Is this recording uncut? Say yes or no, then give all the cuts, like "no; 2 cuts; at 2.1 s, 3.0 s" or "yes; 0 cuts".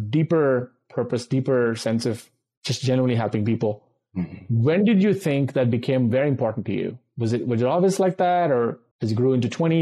yes; 0 cuts